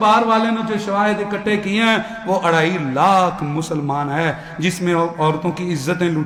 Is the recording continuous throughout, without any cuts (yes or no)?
yes